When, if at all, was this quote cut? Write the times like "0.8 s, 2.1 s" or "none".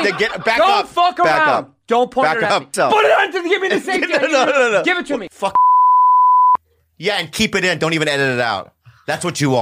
2.7 s, 5.2 s